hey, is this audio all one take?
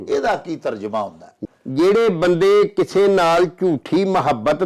no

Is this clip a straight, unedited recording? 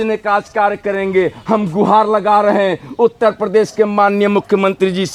yes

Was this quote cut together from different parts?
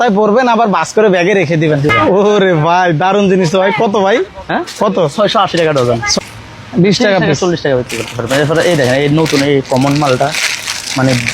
yes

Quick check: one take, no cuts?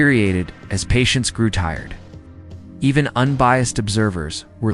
yes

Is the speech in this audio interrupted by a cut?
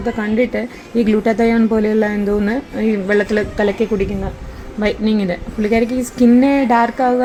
no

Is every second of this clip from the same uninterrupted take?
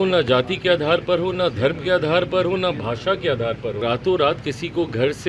no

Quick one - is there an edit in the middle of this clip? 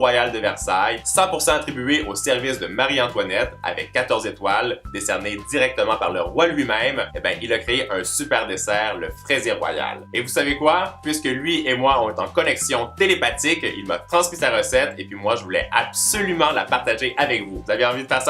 yes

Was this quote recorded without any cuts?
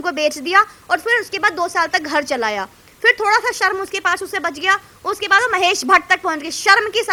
yes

